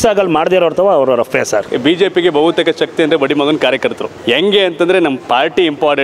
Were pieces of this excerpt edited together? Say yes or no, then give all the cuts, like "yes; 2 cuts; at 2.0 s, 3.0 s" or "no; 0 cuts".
yes; 2 cuts; at 1.7 s, 4.1 s